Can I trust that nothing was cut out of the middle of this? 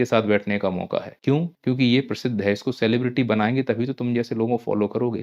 no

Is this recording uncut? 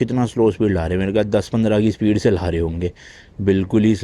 yes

